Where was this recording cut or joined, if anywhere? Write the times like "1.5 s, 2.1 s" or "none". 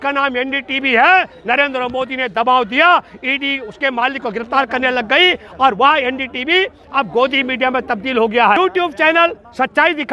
8.6 s